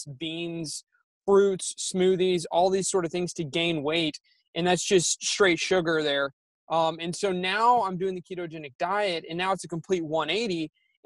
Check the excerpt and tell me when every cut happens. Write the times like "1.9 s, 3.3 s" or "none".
none

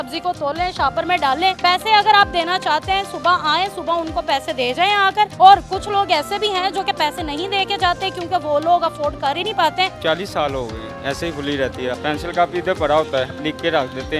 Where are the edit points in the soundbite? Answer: 1.6 s, 5.3 s, 10.0 s, 10.9 s, 12.0 s, 13.3 s

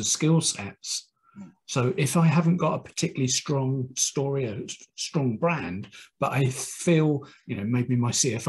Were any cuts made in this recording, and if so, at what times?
none

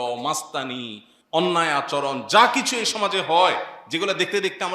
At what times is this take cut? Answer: none

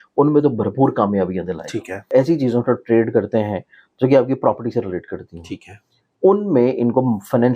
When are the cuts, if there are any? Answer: 2.1 s

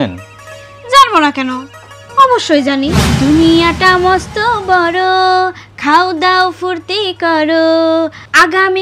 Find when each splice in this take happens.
3.0 s

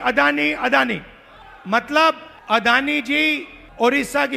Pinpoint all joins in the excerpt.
none

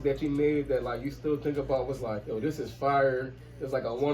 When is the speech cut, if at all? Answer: 2.2 s

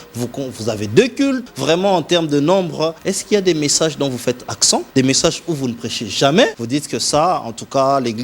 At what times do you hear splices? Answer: 1.4 s, 3.1 s, 4.9 s, 6.6 s

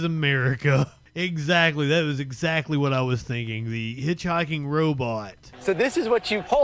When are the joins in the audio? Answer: 1.0 s, 5.4 s

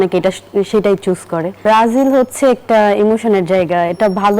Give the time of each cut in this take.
1.6 s

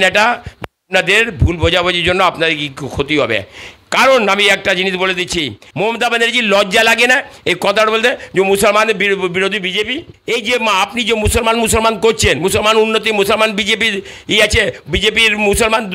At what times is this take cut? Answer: 5.6 s, 10.1 s

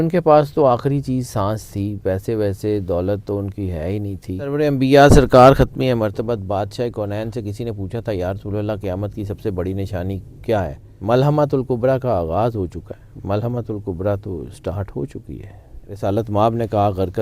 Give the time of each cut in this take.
4.5 s, 10.8 s, 15.8 s

